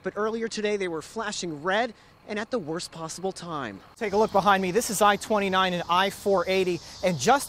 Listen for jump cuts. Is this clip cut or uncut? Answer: cut